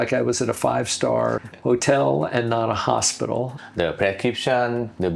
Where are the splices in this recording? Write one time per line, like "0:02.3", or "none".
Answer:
0:01.5
0:03.6